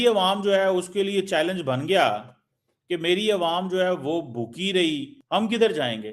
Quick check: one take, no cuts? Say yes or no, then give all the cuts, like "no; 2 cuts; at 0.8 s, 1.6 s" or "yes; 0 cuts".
no; 1 cut; at 5.1 s